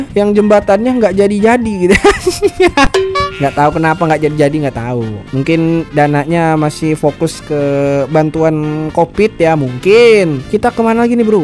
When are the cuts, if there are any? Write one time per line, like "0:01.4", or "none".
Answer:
none